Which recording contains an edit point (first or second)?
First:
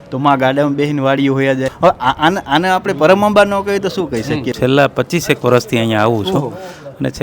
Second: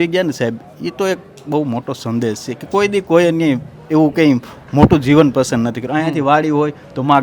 first